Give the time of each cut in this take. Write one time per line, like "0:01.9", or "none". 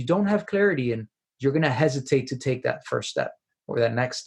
none